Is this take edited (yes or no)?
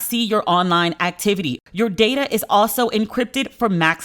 yes